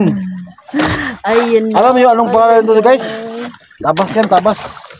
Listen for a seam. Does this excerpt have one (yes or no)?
no